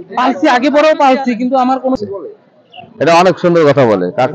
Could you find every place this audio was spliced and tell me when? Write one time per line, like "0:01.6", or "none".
0:02.0

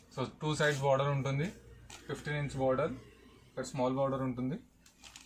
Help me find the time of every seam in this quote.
none

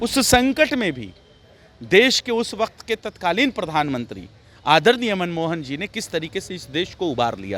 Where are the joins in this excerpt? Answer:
none

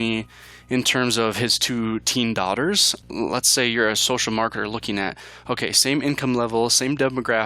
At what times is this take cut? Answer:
0:03.1

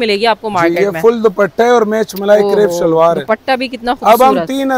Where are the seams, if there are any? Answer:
none

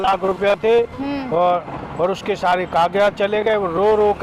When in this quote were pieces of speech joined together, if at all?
none

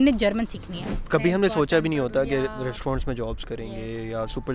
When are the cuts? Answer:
0:00.9

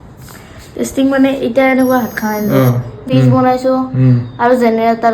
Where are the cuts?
0:03.0

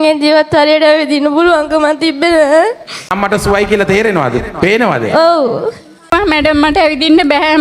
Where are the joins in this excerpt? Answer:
0:03.1
0:06.1

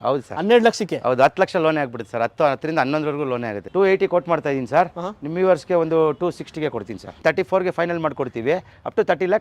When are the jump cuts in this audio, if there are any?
0:03.6
0:07.1

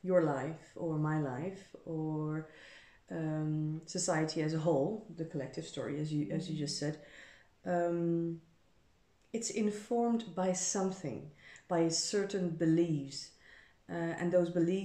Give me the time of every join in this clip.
none

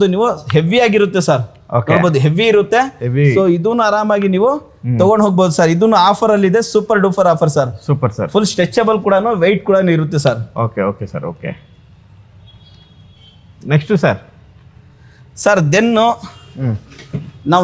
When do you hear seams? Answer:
none

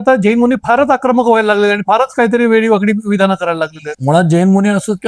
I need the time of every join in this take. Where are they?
0:03.9

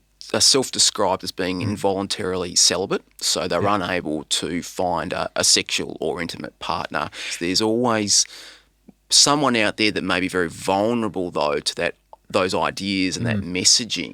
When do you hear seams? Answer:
0:07.3

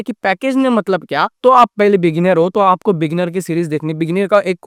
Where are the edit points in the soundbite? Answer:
none

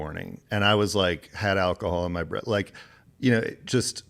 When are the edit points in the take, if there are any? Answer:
none

